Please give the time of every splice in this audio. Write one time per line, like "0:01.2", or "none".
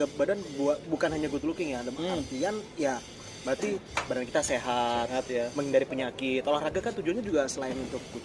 none